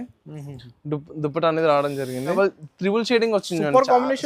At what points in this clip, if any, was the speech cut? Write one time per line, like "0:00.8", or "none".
0:02.3